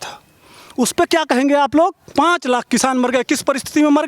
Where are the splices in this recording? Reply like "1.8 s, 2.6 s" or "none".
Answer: 2.1 s